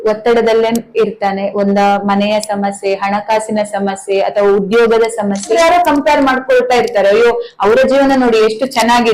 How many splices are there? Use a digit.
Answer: 1